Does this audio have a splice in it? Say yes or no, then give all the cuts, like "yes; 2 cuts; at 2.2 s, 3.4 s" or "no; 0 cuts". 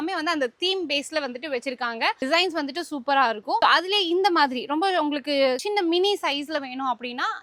no; 0 cuts